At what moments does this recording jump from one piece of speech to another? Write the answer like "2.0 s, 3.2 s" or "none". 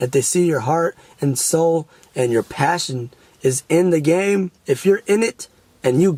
none